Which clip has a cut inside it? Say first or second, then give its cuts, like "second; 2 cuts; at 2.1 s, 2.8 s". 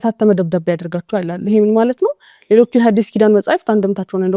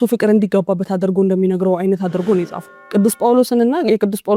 second; 1 cut; at 2.6 s